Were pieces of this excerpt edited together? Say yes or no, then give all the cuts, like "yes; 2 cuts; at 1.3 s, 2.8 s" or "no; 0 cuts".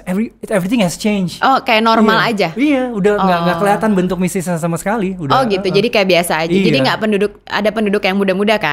no; 0 cuts